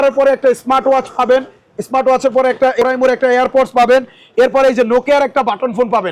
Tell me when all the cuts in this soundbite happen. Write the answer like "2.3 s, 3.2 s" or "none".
2.8 s